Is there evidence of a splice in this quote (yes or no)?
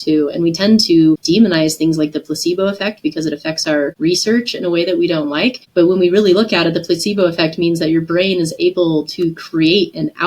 yes